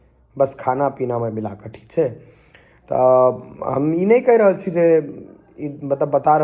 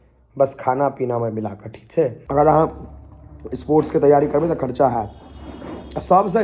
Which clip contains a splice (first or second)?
second